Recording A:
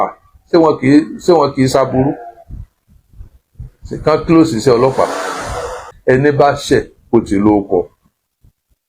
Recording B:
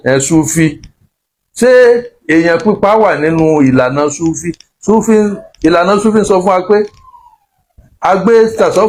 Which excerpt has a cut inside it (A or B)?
A